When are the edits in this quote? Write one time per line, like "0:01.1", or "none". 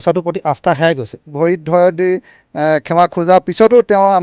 0:01.3